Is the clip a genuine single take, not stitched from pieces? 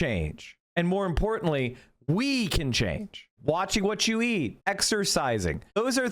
no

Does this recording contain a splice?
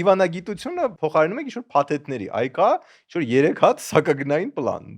yes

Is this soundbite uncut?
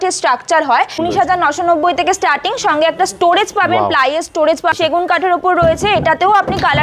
no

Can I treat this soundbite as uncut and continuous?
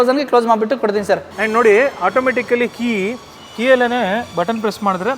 no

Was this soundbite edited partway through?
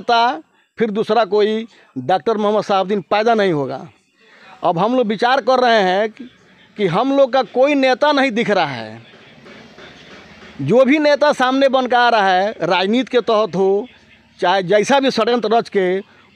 no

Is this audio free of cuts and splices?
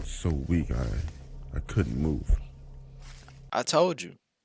yes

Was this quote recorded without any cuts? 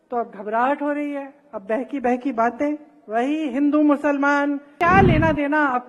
no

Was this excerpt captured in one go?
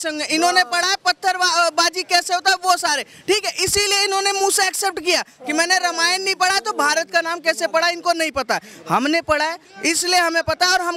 yes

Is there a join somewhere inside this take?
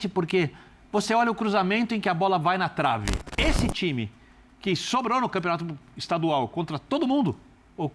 yes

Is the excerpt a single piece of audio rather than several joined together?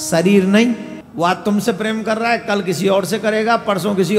no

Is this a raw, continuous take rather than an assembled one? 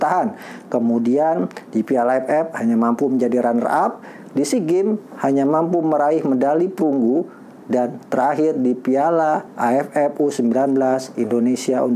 yes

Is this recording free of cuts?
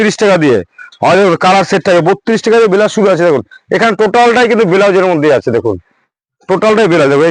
yes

